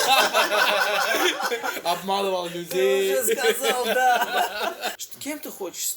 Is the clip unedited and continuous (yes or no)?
no